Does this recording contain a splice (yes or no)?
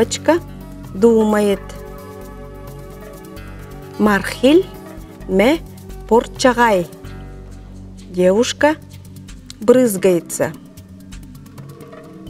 yes